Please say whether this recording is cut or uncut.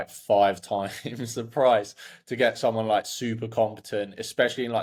uncut